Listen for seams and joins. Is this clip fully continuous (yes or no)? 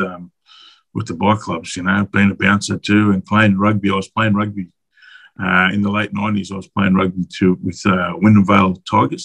yes